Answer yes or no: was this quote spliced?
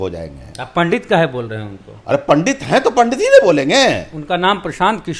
no